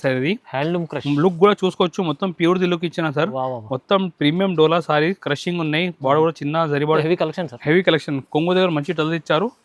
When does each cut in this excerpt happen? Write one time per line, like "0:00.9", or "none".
0:07.0